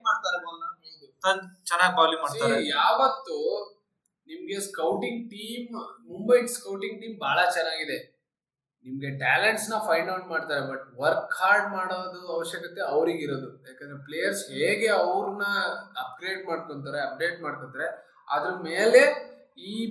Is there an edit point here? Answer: no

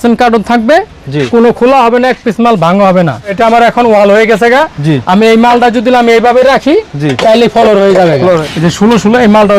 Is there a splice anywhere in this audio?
yes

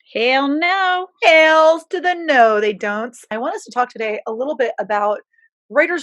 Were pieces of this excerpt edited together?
yes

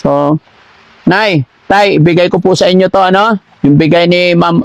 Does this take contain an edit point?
no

